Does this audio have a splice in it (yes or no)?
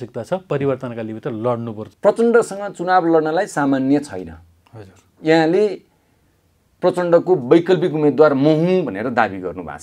yes